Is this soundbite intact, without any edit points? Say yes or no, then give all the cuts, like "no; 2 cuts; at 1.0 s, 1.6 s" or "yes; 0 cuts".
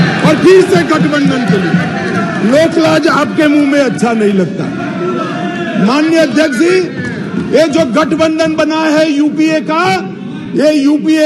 yes; 0 cuts